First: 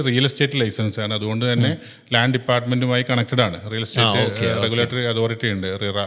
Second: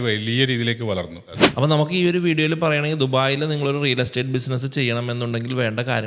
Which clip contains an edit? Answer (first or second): second